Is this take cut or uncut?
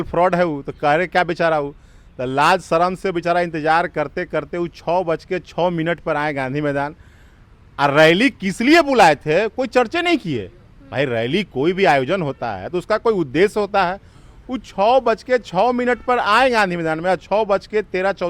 uncut